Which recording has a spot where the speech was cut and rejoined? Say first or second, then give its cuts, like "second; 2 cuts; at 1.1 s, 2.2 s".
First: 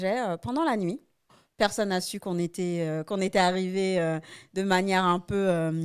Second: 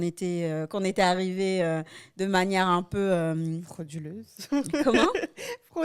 first; 1 cut; at 1.4 s